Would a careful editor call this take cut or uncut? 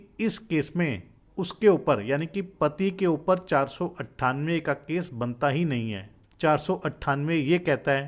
uncut